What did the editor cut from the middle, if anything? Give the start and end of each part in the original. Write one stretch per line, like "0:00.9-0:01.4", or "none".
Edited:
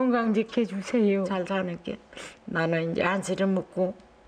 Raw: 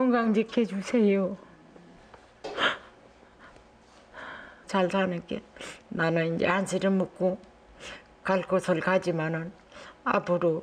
0:01.3-0:04.8